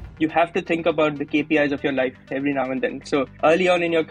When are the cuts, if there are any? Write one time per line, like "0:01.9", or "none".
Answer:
0:01.2
0:03.0